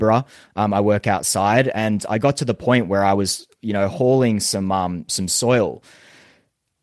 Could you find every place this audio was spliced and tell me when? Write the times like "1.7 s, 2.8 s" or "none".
none